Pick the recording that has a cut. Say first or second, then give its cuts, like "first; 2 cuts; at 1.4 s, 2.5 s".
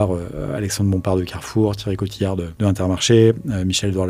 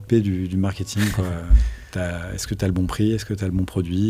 first; 1 cut; at 2.5 s